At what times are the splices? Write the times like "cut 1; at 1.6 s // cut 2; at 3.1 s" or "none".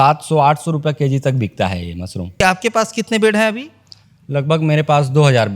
cut 1; at 2.4 s